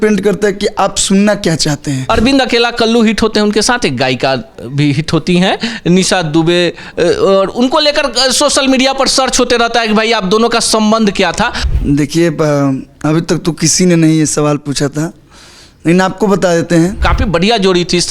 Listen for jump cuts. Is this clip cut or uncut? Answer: cut